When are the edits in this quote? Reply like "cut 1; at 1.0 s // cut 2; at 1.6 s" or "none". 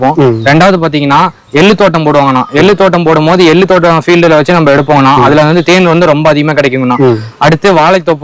none

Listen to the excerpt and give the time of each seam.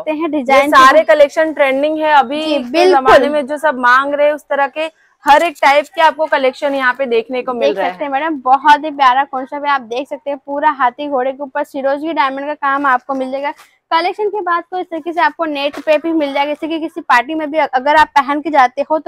none

